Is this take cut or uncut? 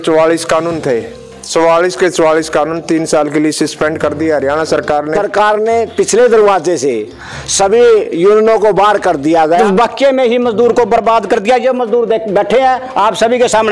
cut